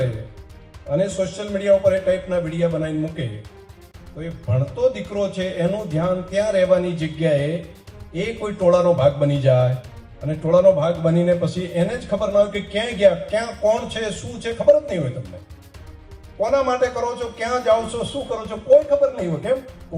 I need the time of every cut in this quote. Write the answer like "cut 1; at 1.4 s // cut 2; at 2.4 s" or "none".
none